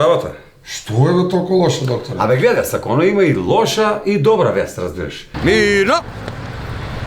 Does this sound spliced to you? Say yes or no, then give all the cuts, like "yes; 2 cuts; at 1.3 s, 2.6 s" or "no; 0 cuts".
yes; 1 cut; at 5.3 s